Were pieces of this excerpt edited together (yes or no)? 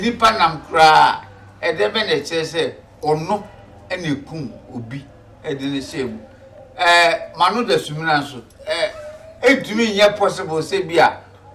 no